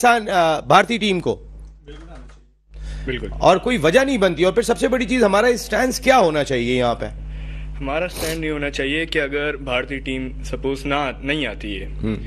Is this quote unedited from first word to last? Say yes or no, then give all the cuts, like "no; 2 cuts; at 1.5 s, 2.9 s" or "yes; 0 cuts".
yes; 0 cuts